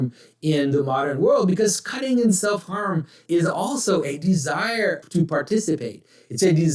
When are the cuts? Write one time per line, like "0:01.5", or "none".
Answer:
0:03.2
0:05.0